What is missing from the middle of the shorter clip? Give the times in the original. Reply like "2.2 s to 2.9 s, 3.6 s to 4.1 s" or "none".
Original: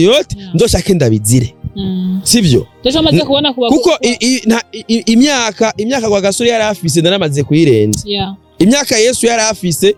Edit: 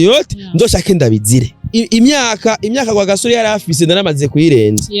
1.6 s to 4.7 s